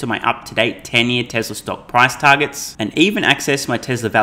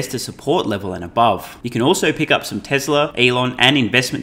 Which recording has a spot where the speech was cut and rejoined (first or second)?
second